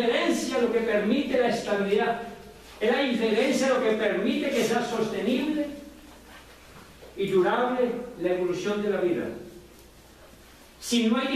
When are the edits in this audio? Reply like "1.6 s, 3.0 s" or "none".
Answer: 8.9 s